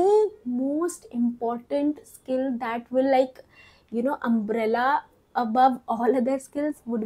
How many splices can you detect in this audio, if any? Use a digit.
0